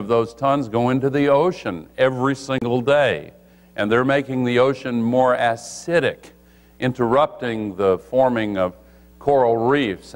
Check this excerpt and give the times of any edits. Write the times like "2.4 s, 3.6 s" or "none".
6.4 s